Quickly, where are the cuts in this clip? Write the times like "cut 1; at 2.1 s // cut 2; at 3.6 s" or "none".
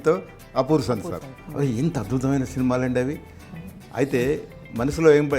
cut 1; at 1.4 s